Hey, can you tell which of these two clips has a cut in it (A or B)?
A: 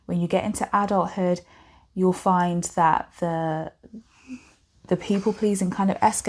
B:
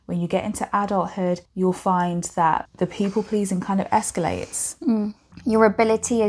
B